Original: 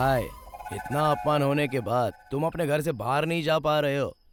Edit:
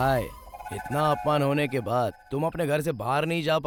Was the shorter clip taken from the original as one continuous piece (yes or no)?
yes